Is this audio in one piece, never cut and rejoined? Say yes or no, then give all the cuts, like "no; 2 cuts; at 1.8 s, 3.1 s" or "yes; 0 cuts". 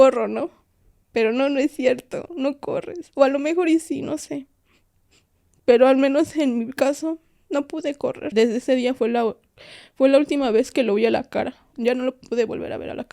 no; 2 cuts; at 8.2 s, 11.7 s